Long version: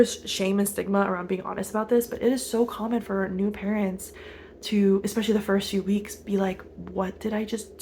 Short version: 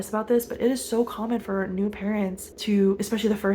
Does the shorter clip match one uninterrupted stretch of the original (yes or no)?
no